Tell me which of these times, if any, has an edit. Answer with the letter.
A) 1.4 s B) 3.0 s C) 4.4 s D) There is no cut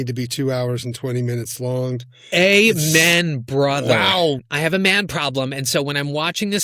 C